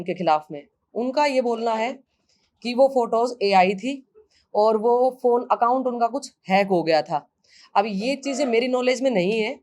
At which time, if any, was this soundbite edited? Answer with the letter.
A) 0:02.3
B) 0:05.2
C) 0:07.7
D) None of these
D